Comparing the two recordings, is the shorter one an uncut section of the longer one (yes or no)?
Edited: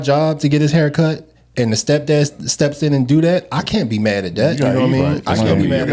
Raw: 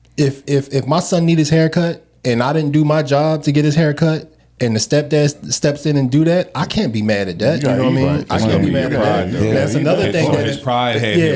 yes